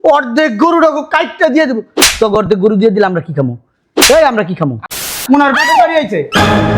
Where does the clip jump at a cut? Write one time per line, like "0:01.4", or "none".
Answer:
0:05.1